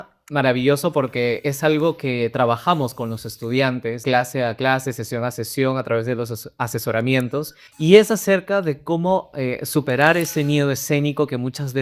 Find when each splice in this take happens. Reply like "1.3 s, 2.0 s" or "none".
4.0 s, 7.6 s